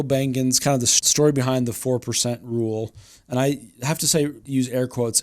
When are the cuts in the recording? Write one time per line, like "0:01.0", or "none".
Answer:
0:00.9
0:04.4